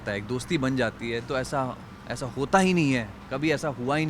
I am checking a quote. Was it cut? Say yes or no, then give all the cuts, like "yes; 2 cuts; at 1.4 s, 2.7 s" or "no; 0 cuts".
no; 0 cuts